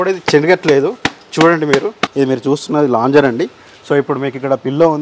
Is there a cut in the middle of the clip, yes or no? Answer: yes